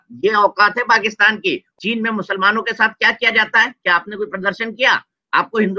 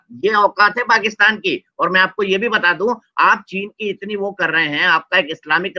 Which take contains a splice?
first; 1 cut; at 1.7 s

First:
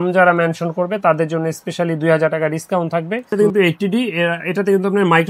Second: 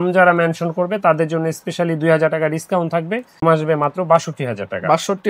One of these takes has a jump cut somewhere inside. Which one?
first; 1 cut; at 3.3 s

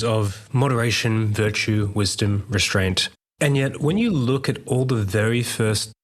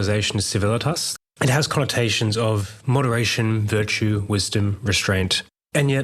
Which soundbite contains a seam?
second; 1 cut; at 1.0 s

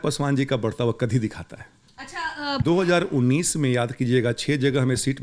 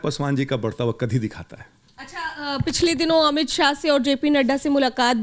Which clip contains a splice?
first; 1 cut; at 2.6 s

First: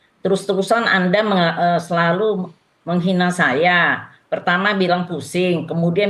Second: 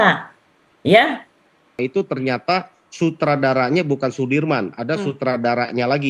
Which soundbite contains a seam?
second; 1 cut; at 1.8 s

